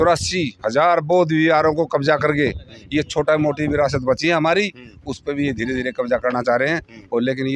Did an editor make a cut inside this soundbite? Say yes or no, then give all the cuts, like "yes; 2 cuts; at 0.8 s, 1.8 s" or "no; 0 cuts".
no; 0 cuts